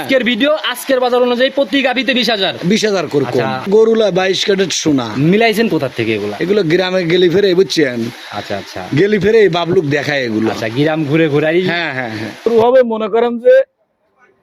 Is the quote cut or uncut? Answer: cut